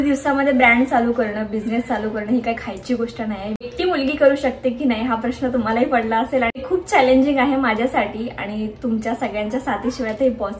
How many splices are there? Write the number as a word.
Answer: two